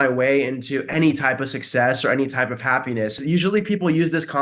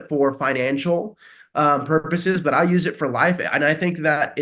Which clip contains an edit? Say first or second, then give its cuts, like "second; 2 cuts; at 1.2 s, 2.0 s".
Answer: first; 1 cut; at 3.2 s